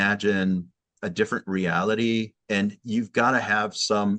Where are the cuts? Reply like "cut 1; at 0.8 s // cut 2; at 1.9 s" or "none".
cut 1; at 0.9 s // cut 2; at 2.4 s